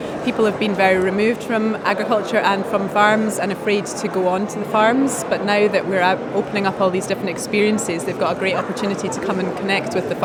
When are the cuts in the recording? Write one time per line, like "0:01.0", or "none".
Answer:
none